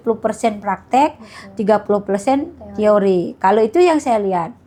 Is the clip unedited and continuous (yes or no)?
yes